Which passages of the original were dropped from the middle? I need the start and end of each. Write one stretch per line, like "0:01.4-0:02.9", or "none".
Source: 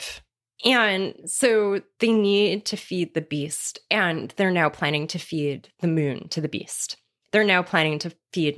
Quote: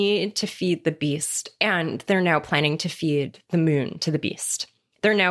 none